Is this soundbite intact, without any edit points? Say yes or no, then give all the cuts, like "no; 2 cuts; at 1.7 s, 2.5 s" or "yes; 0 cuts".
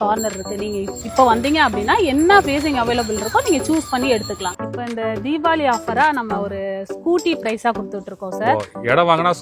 no; 2 cuts; at 0.9 s, 4.5 s